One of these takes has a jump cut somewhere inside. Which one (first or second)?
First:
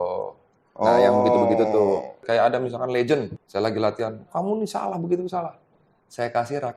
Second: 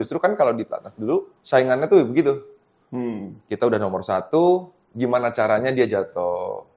first